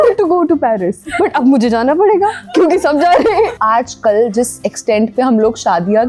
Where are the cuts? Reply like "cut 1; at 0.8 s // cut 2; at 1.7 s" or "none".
none